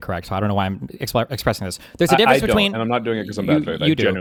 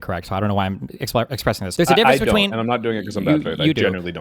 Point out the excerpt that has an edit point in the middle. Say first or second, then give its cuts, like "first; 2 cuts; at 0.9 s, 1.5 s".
second; 1 cut; at 1.7 s